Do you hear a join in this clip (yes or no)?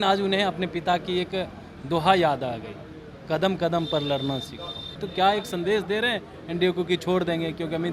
yes